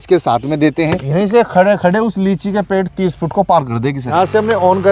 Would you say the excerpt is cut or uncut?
cut